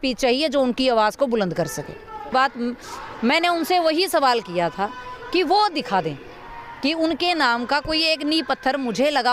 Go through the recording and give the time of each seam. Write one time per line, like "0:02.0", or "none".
0:02.3